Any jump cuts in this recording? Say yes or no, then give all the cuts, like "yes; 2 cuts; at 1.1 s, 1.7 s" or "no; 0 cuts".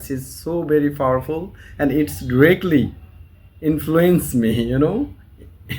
no; 0 cuts